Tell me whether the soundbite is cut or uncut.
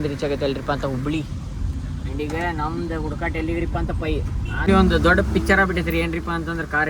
cut